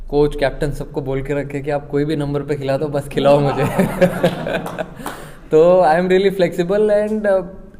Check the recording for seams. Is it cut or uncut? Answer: uncut